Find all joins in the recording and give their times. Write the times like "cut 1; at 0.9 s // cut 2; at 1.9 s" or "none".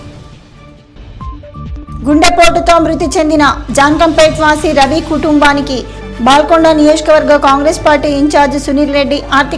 none